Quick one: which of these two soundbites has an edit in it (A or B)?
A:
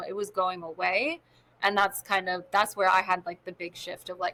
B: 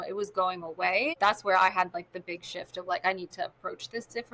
B